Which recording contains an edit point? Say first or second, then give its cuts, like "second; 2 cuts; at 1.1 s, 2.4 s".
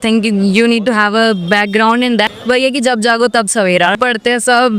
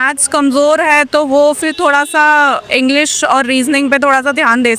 first; 2 cuts; at 2.3 s, 4.0 s